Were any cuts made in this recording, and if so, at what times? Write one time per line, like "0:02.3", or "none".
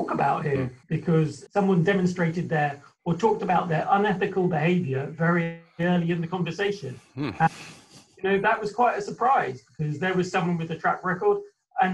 0:01.1